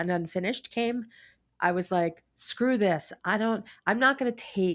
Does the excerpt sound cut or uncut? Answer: uncut